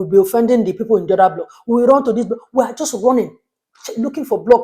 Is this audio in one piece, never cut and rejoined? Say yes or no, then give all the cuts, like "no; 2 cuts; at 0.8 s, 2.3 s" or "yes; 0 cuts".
yes; 0 cuts